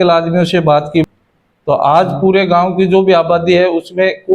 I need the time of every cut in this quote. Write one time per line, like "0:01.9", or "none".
0:01.0